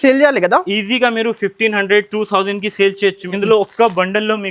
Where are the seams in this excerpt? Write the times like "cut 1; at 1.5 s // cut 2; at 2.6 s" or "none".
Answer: cut 1; at 3.3 s